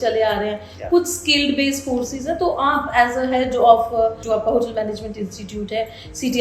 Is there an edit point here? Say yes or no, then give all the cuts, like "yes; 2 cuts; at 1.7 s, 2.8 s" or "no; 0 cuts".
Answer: yes; 1 cut; at 4.2 s